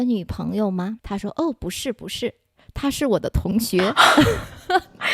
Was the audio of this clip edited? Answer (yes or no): yes